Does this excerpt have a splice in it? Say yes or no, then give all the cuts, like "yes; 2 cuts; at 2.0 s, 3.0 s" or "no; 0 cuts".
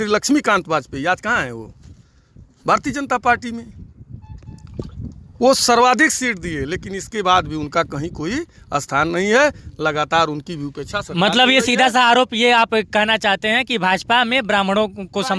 no; 0 cuts